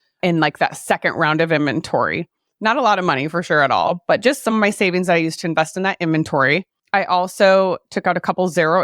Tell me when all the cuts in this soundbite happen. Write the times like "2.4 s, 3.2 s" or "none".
6.8 s